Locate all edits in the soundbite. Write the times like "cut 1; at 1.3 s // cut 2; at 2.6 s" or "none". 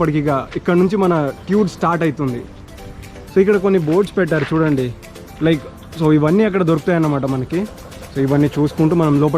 none